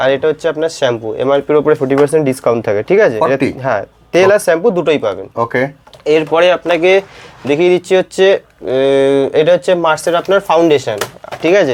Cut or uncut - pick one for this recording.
uncut